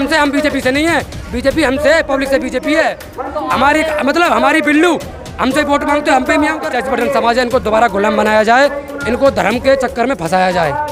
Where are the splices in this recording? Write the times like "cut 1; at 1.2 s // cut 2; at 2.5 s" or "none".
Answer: cut 1; at 6.6 s